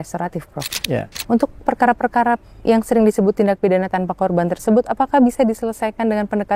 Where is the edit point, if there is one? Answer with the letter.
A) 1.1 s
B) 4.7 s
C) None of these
A